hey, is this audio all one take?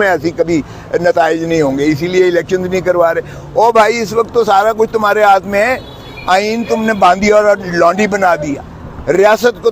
yes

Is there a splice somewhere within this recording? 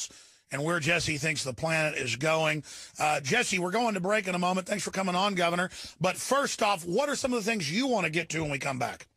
no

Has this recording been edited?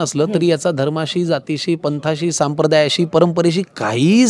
no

